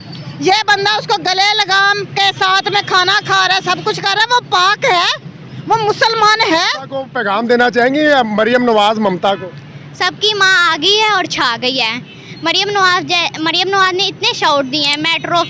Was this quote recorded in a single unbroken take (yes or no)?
no